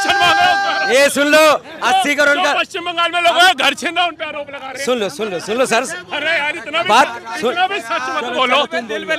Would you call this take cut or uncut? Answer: uncut